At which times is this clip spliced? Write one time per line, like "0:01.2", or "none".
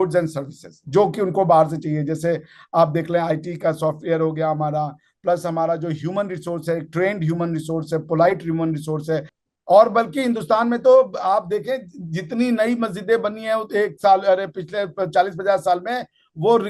0:09.3